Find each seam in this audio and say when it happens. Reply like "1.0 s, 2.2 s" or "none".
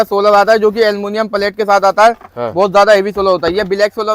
none